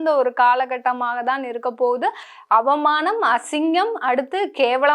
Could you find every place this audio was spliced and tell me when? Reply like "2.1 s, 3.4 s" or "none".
2.3 s